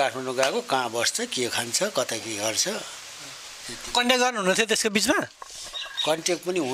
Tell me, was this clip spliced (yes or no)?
no